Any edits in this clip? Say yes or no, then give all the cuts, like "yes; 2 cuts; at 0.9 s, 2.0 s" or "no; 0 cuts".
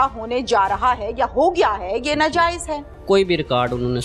yes; 1 cut; at 3.0 s